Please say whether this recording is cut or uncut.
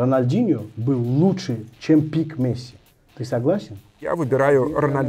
cut